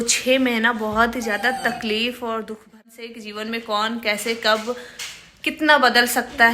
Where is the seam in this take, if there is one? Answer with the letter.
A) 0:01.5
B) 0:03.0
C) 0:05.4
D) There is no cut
B